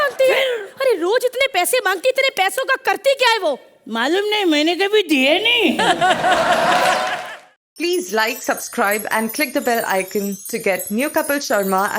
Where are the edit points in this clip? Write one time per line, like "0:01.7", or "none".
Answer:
0:07.1